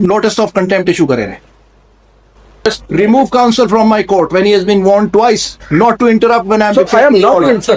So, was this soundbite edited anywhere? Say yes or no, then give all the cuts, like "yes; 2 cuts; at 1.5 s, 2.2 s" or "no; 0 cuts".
yes; 1 cut; at 2.7 s